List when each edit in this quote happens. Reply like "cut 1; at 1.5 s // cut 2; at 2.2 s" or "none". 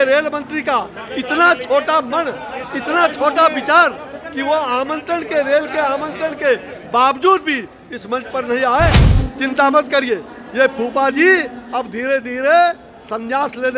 cut 1; at 9.0 s